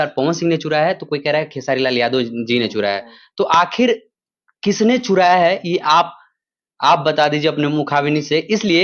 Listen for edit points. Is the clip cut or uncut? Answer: uncut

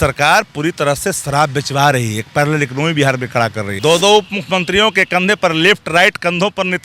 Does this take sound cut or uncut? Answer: cut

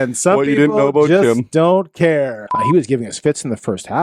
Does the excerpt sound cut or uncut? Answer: cut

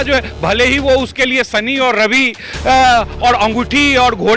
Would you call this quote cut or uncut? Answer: uncut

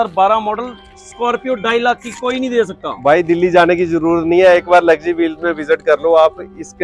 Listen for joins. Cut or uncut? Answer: uncut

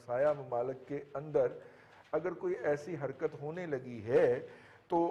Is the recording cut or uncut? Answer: uncut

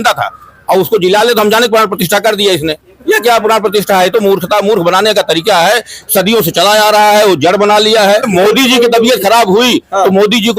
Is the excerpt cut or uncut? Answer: cut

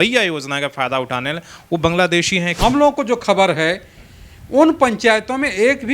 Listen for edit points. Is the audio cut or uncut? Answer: cut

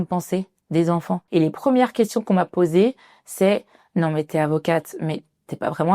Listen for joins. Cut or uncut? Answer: cut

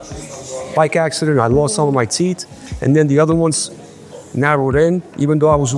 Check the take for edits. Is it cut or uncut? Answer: uncut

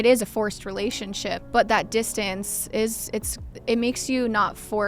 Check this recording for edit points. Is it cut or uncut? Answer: cut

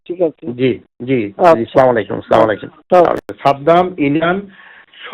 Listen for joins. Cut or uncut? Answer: cut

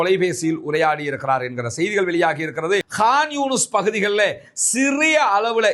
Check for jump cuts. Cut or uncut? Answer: cut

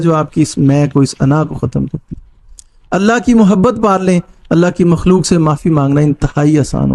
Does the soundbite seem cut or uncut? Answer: uncut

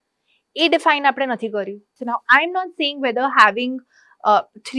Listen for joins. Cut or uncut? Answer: cut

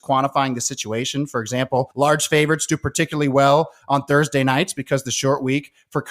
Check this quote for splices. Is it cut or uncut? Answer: cut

